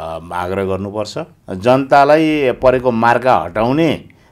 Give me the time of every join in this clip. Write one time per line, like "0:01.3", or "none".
0:01.4